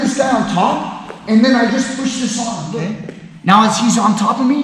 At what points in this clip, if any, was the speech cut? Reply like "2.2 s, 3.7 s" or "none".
2.8 s